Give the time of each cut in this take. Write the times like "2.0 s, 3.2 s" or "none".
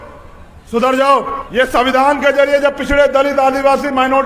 1.4 s